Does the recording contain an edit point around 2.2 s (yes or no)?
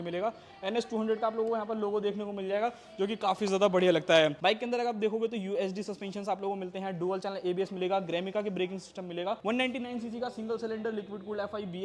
no